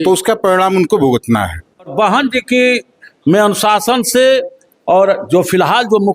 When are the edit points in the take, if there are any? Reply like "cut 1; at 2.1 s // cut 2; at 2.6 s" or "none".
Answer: cut 1; at 1.9 s